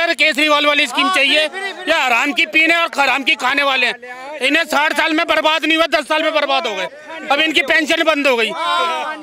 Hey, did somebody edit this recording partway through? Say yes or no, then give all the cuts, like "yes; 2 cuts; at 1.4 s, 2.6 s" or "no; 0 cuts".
no; 0 cuts